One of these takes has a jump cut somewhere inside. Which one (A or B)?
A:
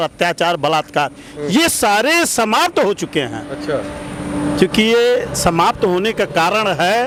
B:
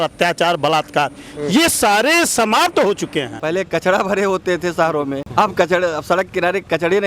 B